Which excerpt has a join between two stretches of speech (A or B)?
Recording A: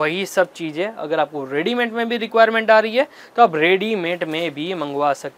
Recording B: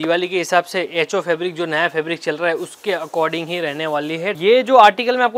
B